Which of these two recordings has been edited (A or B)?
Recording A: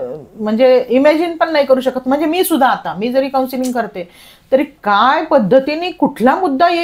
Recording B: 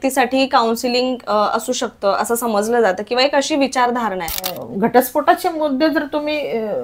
B